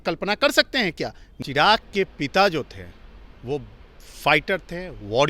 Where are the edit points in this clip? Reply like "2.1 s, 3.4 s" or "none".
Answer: 1.2 s